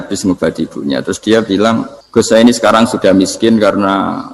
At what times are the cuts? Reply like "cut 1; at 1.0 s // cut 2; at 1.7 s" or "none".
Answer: cut 1; at 2.0 s